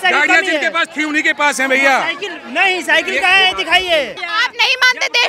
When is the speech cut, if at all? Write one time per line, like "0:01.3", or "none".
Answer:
0:04.2